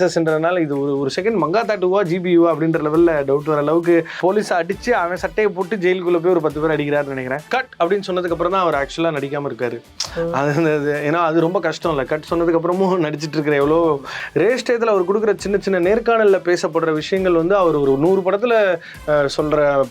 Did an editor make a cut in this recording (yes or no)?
yes